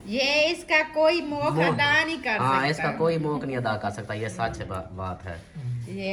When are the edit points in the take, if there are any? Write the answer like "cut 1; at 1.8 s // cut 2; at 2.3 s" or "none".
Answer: none